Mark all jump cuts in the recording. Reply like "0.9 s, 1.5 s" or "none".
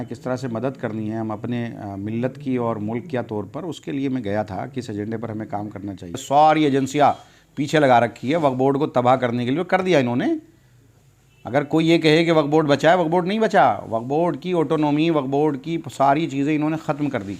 6.2 s